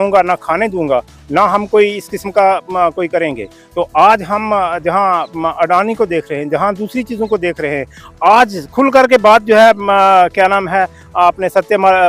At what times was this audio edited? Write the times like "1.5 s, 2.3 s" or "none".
none